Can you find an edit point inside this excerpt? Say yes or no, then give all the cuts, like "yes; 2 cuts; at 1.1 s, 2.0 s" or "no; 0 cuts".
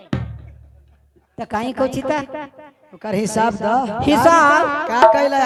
no; 0 cuts